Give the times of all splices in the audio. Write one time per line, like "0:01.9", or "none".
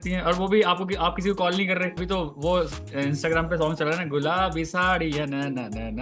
0:02.0